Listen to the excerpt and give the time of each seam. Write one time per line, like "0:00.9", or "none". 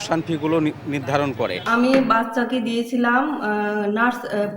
0:01.6